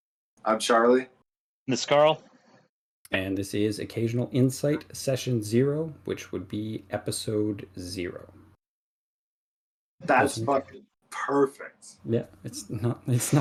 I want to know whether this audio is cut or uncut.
uncut